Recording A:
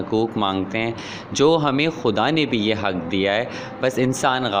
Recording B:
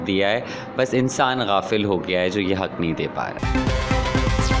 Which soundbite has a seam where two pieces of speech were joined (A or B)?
B